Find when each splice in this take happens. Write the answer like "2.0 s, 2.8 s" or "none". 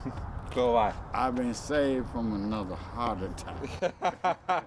none